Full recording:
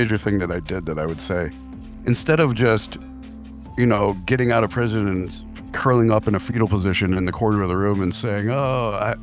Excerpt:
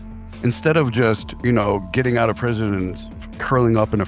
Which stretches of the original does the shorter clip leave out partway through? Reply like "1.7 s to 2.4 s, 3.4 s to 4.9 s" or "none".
2.9 s to 3.6 s